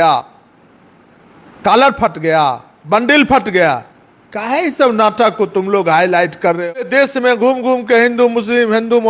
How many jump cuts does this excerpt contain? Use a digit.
1